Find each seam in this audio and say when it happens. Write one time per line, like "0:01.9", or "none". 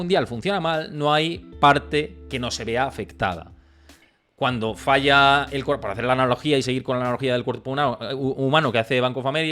none